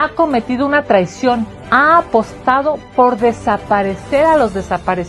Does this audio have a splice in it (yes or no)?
no